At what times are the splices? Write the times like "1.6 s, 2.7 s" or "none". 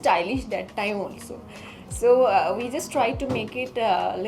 none